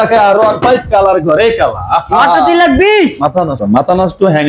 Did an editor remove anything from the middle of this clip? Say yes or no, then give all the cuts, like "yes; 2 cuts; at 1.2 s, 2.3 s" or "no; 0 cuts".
yes; 1 cut; at 3.6 s